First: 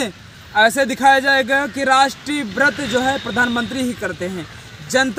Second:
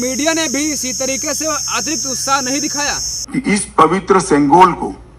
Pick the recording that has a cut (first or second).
second